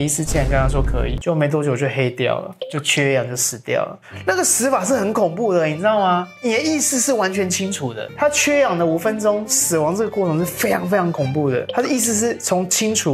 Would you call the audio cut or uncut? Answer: cut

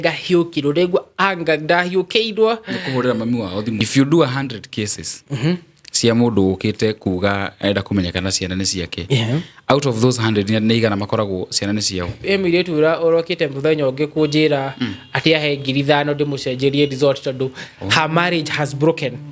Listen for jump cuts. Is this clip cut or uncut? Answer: cut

